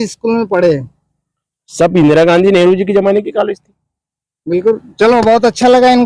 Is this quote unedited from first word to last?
yes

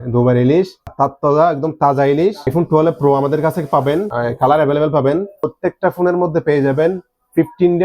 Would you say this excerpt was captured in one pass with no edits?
no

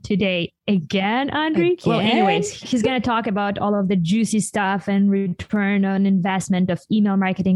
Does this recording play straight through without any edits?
yes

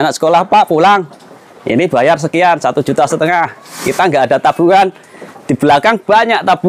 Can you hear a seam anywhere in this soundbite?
no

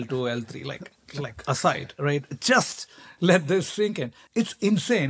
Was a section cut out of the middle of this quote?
yes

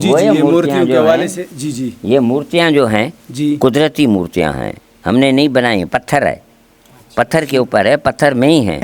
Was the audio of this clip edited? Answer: no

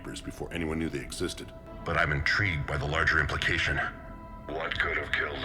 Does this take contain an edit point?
yes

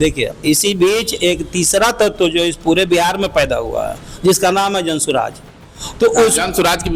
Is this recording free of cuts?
yes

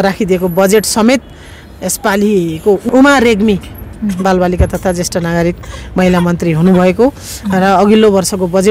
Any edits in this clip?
yes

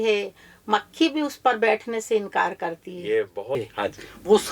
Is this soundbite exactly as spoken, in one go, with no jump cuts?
no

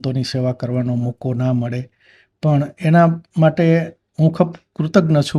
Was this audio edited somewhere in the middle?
no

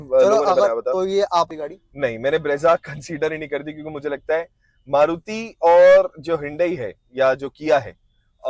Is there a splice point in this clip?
yes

